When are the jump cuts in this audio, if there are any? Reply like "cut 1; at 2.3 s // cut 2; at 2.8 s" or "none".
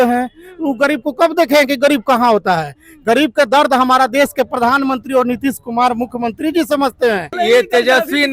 cut 1; at 7.3 s